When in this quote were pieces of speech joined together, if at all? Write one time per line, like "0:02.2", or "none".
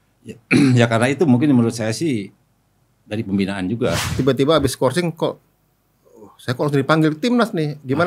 0:04.1